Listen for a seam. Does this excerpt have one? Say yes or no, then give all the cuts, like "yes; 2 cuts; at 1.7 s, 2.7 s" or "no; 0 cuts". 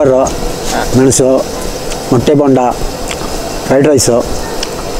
no; 0 cuts